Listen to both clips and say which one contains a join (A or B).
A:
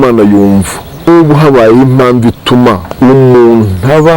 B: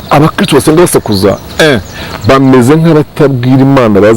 A